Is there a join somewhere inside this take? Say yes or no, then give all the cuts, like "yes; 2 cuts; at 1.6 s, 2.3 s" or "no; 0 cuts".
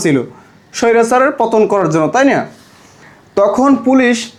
no; 0 cuts